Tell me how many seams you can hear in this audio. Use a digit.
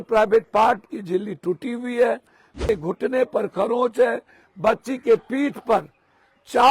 1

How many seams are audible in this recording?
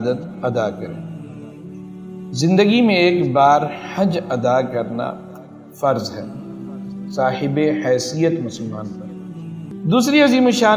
1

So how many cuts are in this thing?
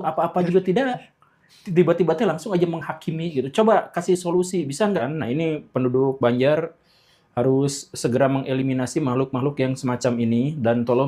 1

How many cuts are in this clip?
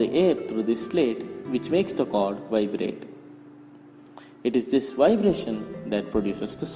1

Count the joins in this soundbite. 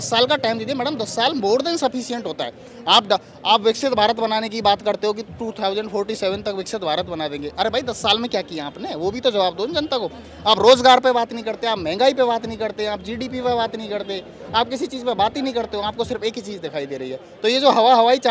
0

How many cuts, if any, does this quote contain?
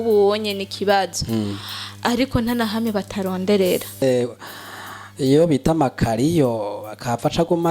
1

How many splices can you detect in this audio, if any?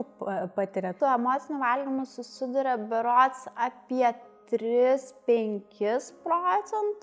1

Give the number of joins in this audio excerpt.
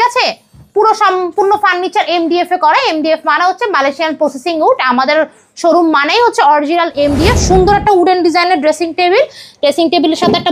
1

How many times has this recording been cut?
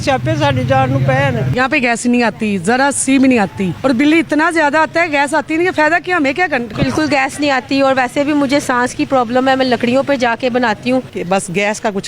4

